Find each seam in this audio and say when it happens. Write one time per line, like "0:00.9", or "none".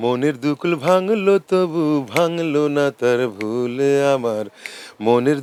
none